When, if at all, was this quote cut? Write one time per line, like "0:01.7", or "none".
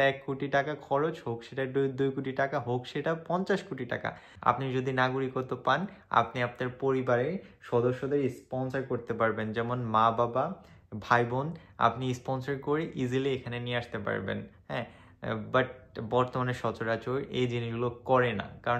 0:04.3